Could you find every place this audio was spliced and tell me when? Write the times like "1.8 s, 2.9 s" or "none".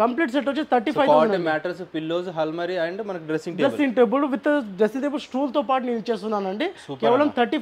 none